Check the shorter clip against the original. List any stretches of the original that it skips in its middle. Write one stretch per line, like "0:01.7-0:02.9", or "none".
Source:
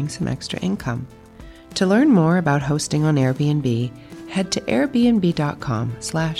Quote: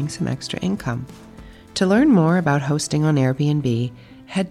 none